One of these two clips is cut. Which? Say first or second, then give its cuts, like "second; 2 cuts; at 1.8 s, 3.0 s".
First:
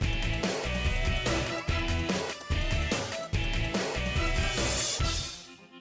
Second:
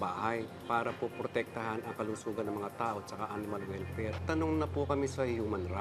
first; 1 cut; at 1.9 s